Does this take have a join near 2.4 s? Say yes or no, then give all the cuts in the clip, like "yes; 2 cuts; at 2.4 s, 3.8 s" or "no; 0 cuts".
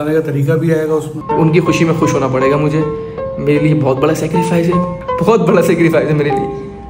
no; 1 cut; at 1.1 s